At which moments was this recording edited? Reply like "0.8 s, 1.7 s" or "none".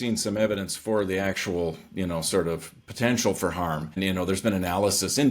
4.0 s